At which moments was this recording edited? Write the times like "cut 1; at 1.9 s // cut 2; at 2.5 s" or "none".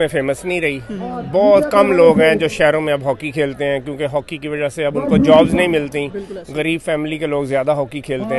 none